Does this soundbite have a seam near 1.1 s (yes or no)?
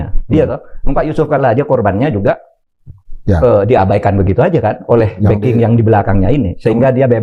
no